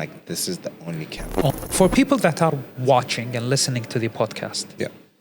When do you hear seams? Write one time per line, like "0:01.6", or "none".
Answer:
0:01.5